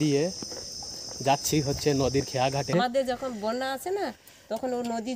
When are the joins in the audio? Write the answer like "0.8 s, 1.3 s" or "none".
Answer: 2.7 s